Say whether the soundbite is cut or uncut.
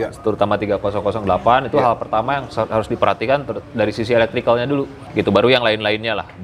cut